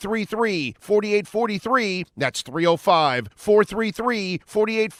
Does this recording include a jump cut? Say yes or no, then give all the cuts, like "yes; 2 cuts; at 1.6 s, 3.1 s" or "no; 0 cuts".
no; 0 cuts